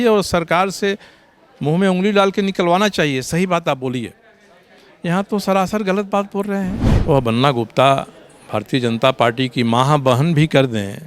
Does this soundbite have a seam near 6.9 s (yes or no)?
yes